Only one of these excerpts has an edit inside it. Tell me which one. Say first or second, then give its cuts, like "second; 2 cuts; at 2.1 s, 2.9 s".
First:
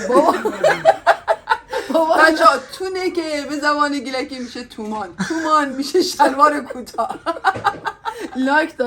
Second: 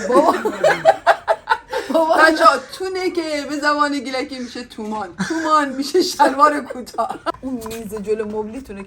second; 1 cut; at 7.4 s